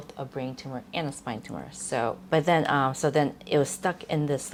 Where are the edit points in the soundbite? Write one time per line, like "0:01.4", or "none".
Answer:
none